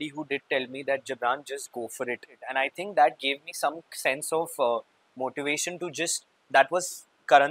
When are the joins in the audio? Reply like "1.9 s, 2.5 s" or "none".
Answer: 2.4 s, 6.4 s